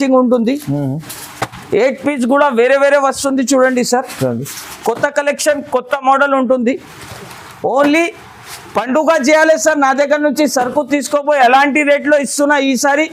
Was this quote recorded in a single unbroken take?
yes; 0 cuts

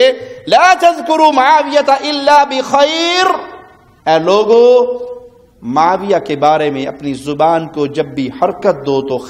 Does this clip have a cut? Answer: no; 0 cuts

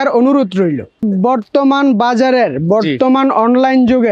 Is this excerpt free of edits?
no; 1 cut; at 1.3 s

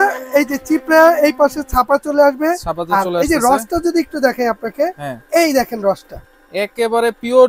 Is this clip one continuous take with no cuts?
yes; 0 cuts

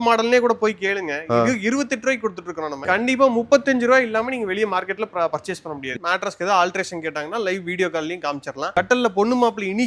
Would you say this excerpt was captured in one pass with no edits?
no; 2 cuts; at 2.8 s, 5.9 s

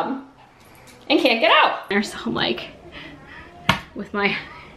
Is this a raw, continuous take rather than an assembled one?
no; 1 cut; at 1.9 s

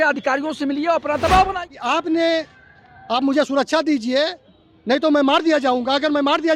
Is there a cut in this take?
yes; 1 cut; at 1.5 s

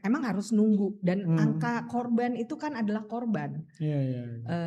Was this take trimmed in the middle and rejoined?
no; 0 cuts

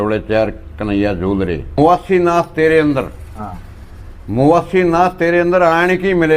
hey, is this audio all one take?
no; 1 cut; at 1.8 s

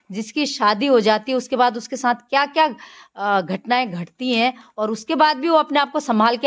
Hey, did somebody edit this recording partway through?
no; 0 cuts

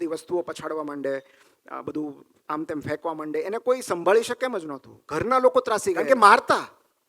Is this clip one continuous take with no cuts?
no; 1 cut; at 6.0 s

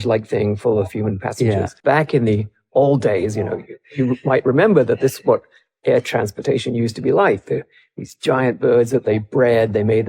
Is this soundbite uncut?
no; 1 cut; at 1.7 s

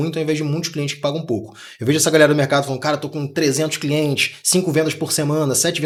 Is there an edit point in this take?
no; 0 cuts

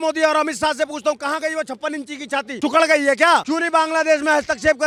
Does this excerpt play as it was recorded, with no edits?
yes; 0 cuts

